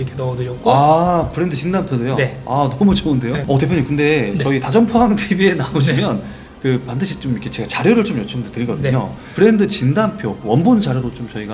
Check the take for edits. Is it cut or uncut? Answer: uncut